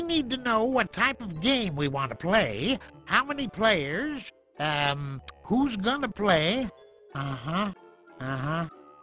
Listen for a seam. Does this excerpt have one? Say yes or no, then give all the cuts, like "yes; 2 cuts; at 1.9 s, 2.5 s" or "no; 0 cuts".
no; 0 cuts